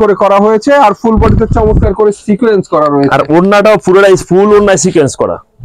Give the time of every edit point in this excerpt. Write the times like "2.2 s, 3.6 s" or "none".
none